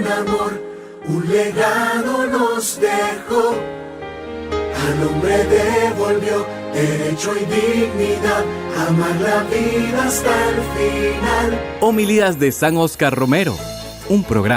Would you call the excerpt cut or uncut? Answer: cut